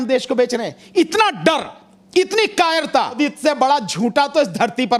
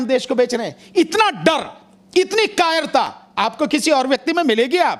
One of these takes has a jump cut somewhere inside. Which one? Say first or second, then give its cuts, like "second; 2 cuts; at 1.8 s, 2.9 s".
first; 1 cut; at 3.1 s